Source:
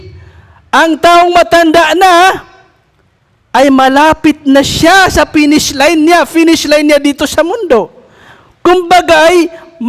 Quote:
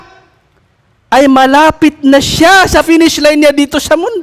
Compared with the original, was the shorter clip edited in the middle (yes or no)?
yes